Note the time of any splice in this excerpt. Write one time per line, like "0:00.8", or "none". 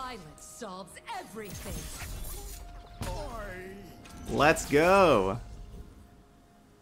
none